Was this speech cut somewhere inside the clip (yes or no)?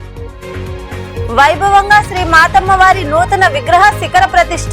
yes